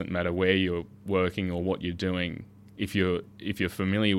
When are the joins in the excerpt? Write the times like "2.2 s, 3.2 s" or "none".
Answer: none